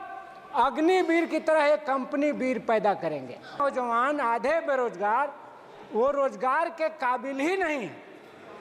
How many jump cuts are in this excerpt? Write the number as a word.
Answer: one